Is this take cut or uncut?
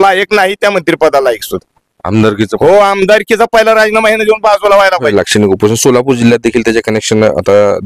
cut